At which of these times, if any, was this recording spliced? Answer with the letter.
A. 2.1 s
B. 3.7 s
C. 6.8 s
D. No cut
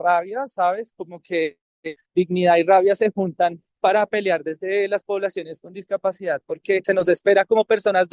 C